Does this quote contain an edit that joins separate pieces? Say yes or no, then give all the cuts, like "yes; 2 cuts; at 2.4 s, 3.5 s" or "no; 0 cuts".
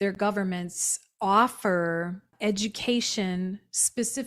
yes; 1 cut; at 2.3 s